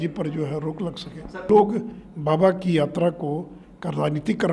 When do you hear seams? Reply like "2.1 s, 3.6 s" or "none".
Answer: 1.5 s